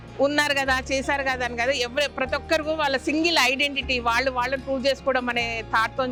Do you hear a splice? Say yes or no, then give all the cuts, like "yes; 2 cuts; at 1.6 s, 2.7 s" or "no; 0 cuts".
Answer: no; 0 cuts